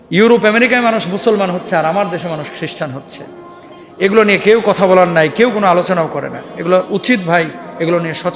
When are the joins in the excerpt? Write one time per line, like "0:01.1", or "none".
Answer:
none